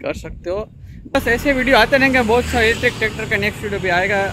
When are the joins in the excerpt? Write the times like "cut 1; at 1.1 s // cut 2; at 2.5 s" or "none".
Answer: cut 1; at 1.1 s